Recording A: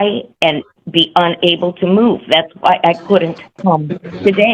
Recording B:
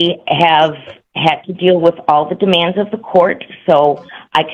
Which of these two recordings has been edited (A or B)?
A